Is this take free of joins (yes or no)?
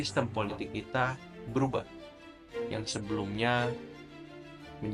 yes